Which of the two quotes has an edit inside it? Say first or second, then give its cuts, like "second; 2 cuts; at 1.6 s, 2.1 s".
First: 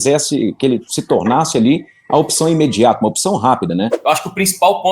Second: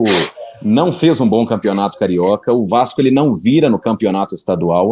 first; 1 cut; at 3.9 s